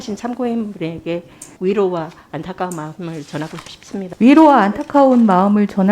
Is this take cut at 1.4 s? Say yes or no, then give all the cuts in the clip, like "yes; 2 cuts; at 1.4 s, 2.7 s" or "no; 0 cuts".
yes; 2 cuts; at 1.4 s, 4.1 s